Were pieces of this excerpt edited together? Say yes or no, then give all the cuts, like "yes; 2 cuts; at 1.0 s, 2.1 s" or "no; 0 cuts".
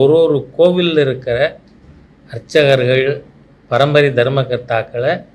no; 0 cuts